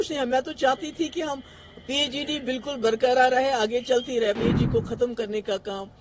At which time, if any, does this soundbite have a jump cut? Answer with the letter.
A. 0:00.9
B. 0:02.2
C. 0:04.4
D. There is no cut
C